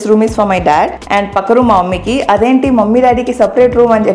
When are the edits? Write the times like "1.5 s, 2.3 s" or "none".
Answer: 1.0 s